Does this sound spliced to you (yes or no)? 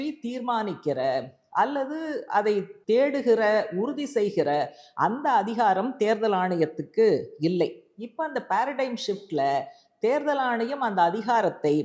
no